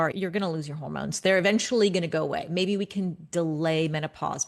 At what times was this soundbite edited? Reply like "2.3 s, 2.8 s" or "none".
none

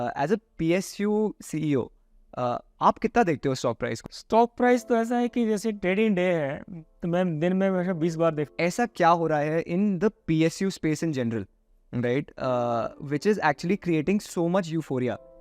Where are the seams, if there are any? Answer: 4.0 s, 8.5 s

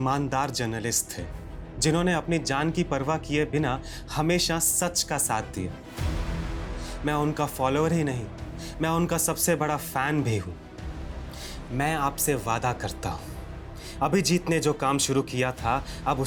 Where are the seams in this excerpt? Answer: none

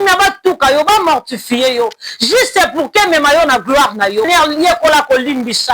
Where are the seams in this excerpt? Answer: 4.3 s

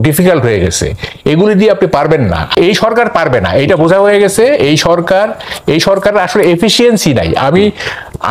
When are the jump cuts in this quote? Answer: 2.5 s

